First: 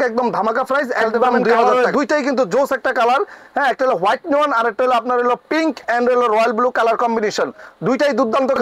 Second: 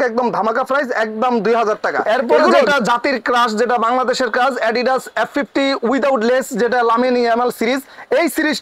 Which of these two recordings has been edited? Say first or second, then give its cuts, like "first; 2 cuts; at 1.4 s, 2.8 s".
first; 1 cut; at 1.6 s